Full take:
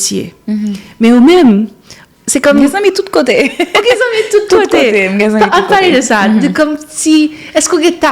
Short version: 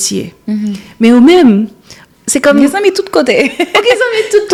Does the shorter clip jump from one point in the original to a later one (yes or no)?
no